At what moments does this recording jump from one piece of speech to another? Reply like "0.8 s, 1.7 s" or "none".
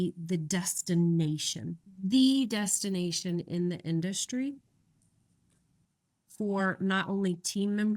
none